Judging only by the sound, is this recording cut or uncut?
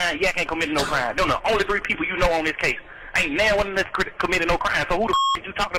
uncut